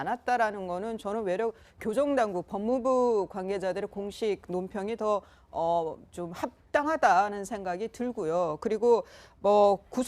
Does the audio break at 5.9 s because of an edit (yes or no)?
yes